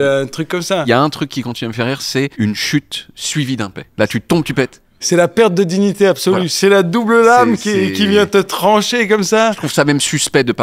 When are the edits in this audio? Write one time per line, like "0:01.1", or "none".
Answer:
0:00.8
0:02.3
0:03.8
0:05.0
0:09.7